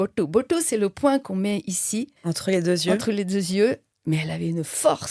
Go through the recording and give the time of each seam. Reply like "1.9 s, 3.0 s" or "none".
2.1 s, 3.9 s